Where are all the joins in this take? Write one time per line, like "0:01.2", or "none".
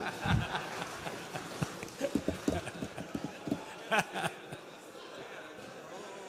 none